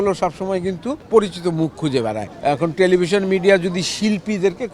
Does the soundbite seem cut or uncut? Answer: cut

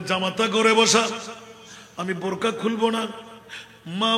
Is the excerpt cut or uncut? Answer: uncut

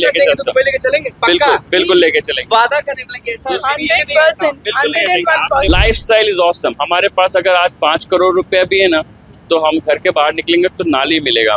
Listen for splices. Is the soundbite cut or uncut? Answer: cut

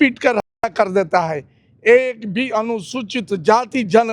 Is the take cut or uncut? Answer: uncut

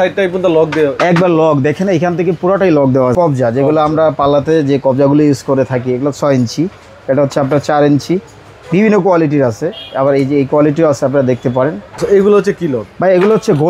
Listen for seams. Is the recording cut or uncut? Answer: cut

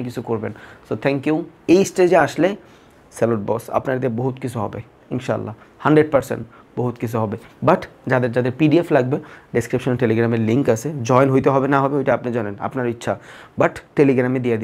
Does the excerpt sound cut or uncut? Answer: uncut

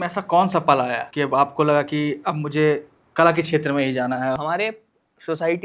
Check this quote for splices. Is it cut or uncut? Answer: cut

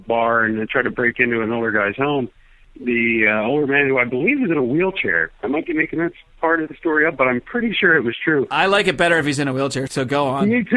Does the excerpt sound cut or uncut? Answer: uncut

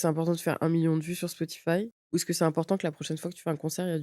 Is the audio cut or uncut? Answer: cut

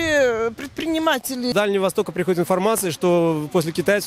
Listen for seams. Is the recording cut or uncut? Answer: cut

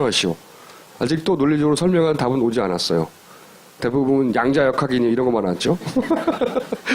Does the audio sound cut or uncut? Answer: cut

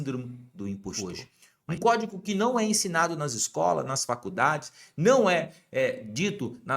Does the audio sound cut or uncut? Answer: cut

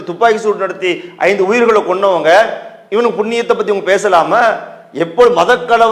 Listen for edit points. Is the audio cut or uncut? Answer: uncut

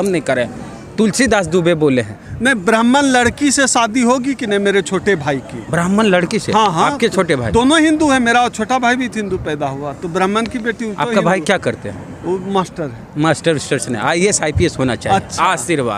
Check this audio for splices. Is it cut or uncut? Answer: uncut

